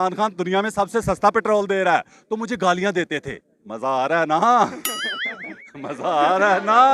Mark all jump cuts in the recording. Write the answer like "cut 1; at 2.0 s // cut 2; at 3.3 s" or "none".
cut 1; at 3.2 s